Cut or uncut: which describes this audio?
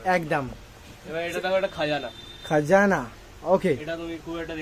uncut